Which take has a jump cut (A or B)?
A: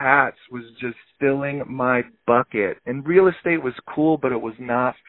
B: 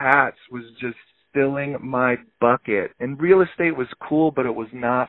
A